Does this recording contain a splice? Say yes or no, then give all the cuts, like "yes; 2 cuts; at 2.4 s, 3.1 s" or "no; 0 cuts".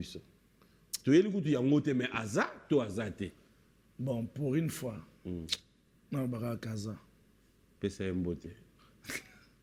no; 0 cuts